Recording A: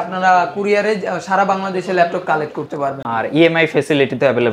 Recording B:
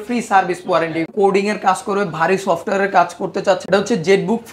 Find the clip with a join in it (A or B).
B